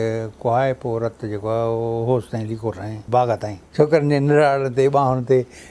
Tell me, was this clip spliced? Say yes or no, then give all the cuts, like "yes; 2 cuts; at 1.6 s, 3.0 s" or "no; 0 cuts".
yes; 1 cut; at 3.6 s